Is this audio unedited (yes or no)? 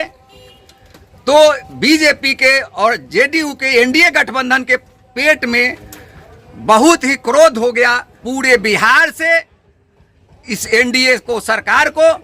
no